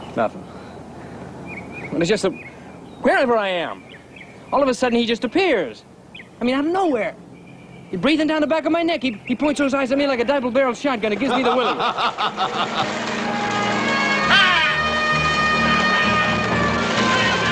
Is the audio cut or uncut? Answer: uncut